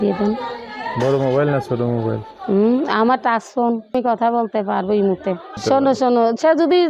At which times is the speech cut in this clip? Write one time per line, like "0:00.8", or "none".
0:03.9
0:05.6